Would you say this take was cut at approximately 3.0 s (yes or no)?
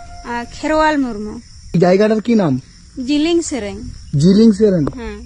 no